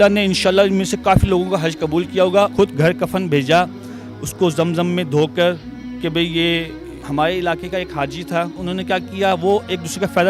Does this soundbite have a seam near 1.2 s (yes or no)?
no